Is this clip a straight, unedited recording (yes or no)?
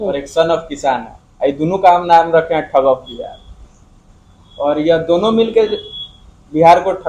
yes